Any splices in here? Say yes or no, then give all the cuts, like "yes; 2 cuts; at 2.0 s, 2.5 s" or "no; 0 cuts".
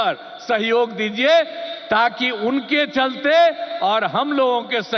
no; 0 cuts